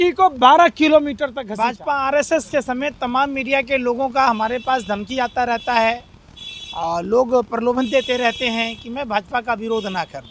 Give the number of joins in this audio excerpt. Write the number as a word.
one